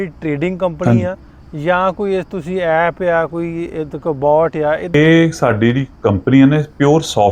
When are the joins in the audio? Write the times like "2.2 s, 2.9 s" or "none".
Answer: 4.9 s